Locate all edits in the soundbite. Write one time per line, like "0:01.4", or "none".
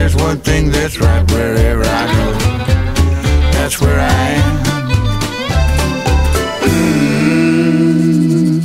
none